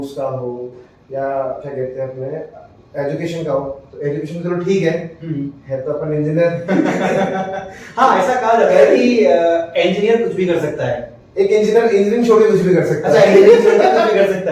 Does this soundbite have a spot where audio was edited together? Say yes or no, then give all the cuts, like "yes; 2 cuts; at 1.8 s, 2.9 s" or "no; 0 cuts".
no; 0 cuts